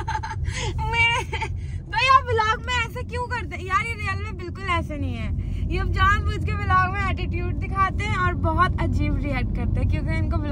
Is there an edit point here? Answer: no; 0 cuts

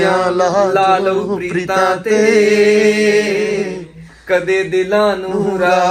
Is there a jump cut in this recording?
no; 0 cuts

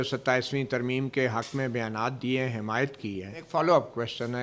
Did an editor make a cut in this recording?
yes; 1 cut; at 3.5 s

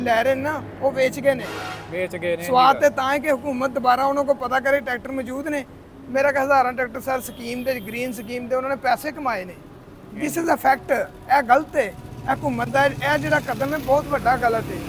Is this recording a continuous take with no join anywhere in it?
yes; 0 cuts

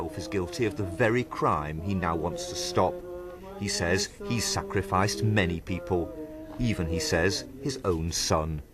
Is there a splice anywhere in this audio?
yes; 1 cut; at 3.5 s

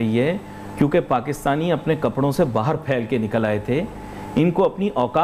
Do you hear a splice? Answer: no; 0 cuts

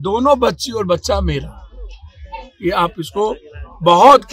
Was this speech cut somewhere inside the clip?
no; 0 cuts

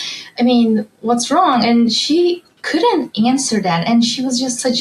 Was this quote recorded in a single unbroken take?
yes; 0 cuts

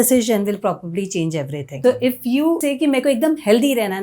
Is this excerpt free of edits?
no; 2 cuts; at 1.6 s, 2.6 s

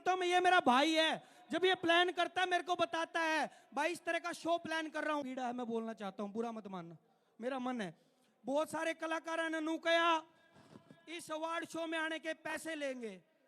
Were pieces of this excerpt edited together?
yes; 1 cut; at 5.2 s

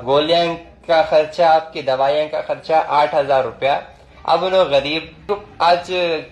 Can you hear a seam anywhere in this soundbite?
yes; 1 cut; at 5.3 s

